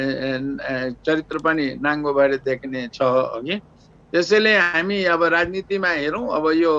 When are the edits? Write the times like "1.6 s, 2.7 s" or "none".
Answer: none